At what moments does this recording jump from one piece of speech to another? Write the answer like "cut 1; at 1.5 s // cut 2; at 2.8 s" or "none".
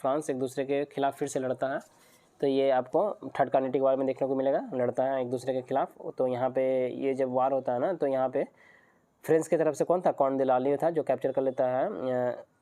none